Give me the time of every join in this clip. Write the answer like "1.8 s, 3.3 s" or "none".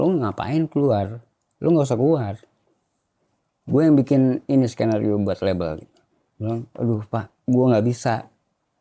none

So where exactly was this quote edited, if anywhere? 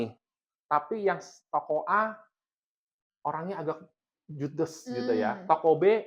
none

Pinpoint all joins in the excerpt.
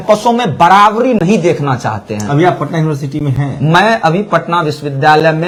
none

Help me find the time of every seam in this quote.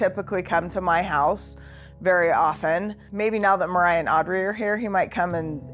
none

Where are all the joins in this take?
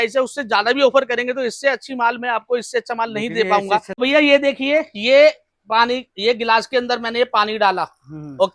3.9 s

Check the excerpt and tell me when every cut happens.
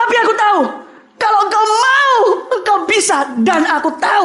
none

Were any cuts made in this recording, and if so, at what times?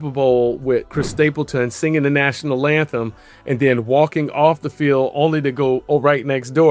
1.0 s

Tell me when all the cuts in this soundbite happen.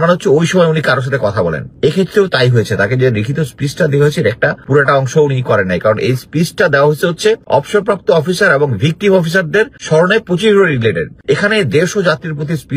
1.7 s, 4.6 s, 7.4 s, 9.8 s, 11.1 s

